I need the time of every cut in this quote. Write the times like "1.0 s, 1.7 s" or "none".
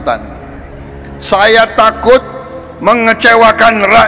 none